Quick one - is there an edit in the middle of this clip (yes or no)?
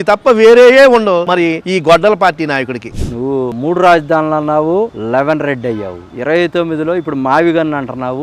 yes